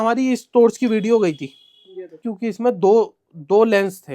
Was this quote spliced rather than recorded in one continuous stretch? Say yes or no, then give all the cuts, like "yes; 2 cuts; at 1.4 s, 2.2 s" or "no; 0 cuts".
yes; 1 cut; at 2.3 s